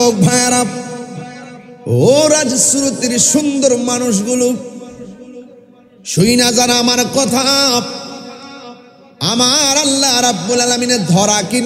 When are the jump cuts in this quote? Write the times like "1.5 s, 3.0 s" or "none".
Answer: none